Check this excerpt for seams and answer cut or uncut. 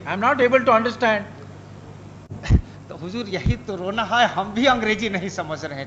uncut